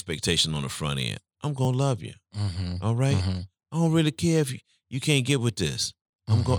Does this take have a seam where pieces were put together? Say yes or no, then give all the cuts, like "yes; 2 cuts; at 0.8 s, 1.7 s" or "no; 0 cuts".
no; 0 cuts